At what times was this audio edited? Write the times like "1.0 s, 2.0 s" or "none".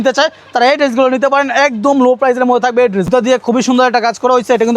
3.1 s